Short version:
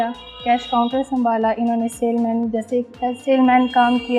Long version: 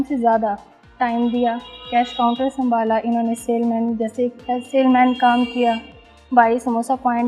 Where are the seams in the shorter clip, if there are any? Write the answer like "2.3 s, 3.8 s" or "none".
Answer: none